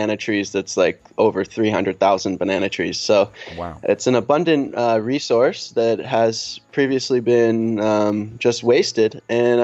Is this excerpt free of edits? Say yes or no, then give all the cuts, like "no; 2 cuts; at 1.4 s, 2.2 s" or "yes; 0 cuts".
yes; 0 cuts